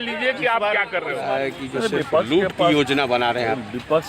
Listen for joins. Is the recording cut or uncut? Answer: cut